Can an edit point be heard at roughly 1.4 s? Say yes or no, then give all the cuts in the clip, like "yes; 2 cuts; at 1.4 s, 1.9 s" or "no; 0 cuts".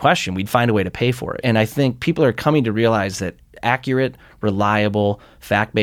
yes; 1 cut; at 1.4 s